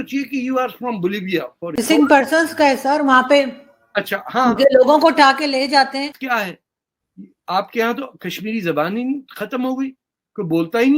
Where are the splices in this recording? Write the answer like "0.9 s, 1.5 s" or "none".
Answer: 1.8 s, 6.2 s